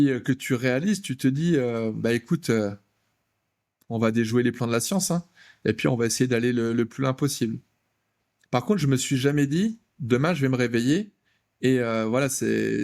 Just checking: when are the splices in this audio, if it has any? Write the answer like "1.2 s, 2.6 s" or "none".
none